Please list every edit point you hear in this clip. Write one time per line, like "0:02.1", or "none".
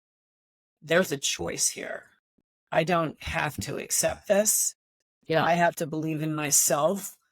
0:02.4